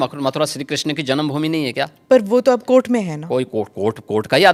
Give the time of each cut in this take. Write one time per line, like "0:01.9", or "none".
none